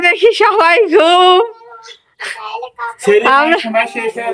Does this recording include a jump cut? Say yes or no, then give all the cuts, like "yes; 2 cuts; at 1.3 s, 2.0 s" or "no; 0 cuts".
no; 0 cuts